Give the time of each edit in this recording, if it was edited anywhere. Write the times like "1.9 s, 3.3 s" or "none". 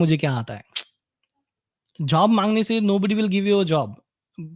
none